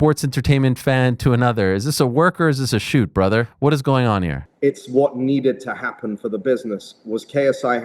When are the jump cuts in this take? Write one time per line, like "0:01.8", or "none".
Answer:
0:03.5
0:04.4